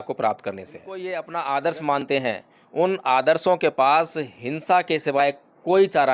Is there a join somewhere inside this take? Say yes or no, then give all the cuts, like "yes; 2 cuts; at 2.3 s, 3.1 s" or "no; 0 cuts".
yes; 1 cut; at 1.1 s